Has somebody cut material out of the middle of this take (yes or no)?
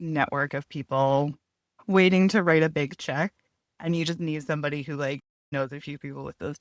yes